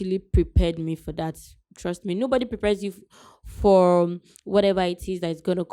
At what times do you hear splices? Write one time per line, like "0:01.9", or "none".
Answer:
none